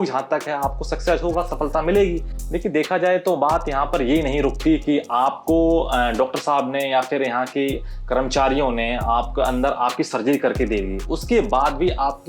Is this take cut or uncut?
cut